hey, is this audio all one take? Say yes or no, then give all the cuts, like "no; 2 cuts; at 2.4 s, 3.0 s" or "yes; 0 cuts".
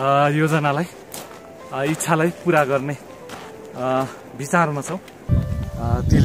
no; 1 cut; at 5.3 s